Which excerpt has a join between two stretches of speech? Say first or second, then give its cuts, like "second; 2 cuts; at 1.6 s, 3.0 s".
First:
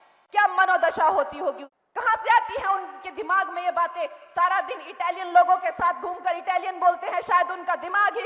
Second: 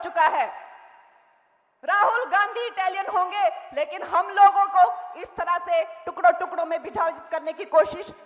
first; 1 cut; at 1.7 s